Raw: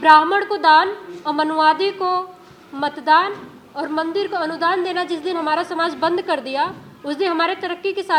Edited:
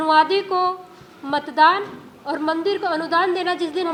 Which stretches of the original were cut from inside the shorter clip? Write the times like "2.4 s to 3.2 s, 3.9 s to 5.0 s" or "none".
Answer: none